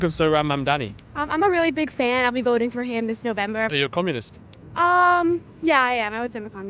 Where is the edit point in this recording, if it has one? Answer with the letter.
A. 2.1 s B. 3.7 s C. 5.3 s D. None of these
B